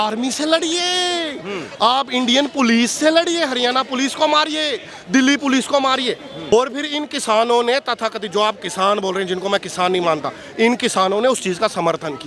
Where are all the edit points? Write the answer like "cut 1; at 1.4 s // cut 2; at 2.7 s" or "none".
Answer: cut 1; at 6.5 s